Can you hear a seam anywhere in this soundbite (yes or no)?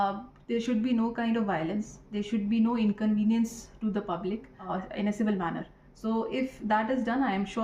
yes